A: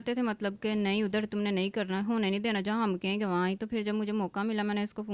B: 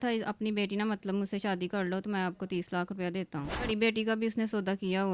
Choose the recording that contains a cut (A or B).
B